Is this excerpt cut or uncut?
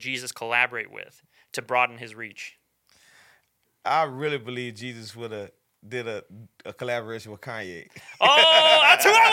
cut